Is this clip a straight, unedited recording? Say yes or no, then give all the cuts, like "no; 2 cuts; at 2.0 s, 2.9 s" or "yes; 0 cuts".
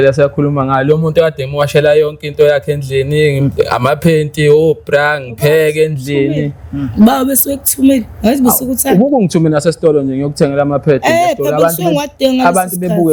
yes; 0 cuts